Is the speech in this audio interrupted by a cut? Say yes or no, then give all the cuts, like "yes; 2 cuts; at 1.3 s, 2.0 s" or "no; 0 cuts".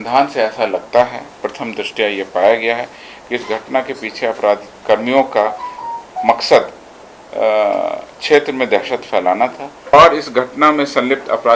yes; 1 cut; at 9.9 s